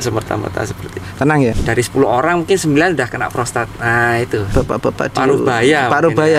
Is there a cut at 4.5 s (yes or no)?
yes